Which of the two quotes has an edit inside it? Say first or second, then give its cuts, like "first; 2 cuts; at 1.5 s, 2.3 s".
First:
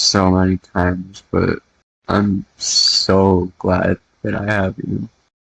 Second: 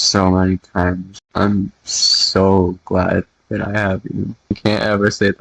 second; 2 cuts; at 1.1 s, 4.6 s